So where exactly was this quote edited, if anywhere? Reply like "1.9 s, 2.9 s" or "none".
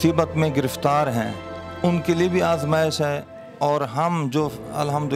none